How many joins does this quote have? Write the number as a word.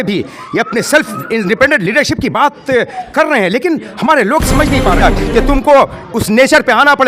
one